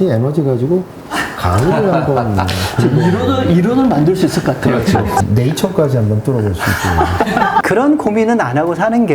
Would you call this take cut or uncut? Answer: cut